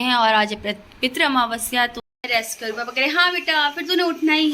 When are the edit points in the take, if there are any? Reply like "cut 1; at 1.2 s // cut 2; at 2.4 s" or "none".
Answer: cut 1; at 2.0 s